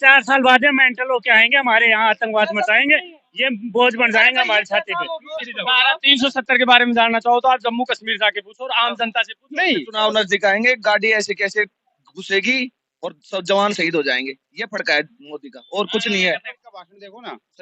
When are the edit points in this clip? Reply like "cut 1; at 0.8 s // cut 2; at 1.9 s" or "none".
cut 1; at 5.5 s // cut 2; at 9.9 s // cut 3; at 16.5 s